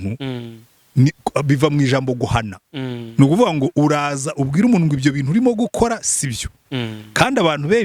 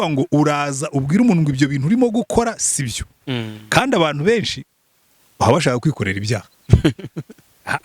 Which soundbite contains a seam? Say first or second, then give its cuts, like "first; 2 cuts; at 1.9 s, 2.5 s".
second; 1 cut; at 6.6 s